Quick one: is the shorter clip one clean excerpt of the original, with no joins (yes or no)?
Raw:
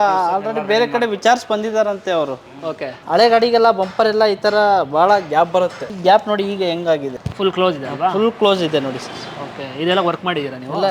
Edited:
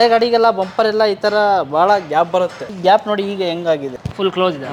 yes